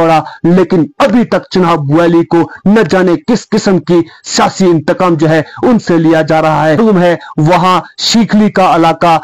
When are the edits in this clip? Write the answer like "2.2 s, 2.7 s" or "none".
6.8 s

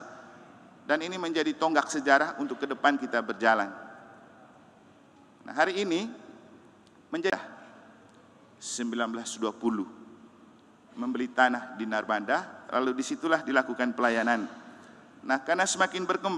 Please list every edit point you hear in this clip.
7.3 s

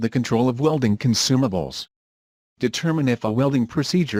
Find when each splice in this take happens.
none

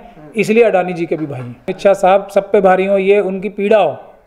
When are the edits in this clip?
1.7 s

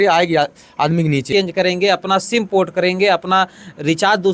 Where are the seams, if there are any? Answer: 1.3 s

